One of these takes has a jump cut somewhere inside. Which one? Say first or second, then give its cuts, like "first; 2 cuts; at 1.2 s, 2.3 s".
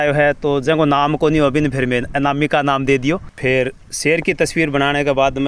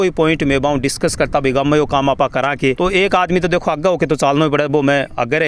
first; 1 cut; at 3.3 s